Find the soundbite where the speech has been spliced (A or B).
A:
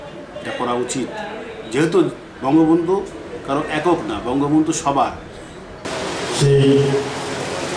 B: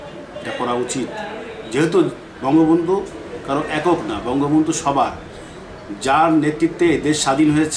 A